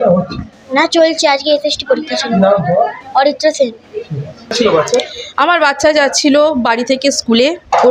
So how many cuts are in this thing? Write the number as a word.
zero